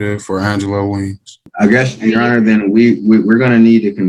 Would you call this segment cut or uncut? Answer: uncut